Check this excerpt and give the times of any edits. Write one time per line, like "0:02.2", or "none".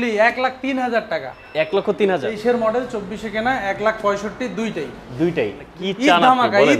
0:02.3
0:05.7